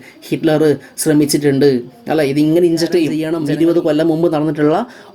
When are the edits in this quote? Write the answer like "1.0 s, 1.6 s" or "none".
3.3 s